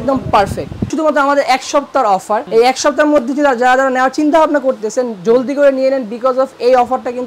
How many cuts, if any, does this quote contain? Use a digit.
2